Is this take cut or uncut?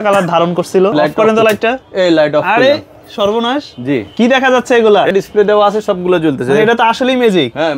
cut